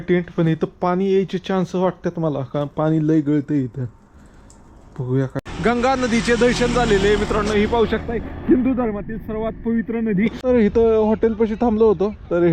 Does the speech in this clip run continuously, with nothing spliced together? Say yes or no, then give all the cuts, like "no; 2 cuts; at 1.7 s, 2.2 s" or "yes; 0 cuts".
no; 2 cuts; at 5.5 s, 10.4 s